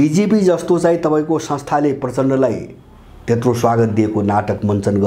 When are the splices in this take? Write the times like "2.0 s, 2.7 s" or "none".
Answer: none